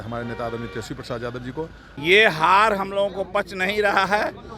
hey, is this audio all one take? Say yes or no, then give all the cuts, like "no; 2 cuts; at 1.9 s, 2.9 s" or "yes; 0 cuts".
no; 1 cut; at 1.8 s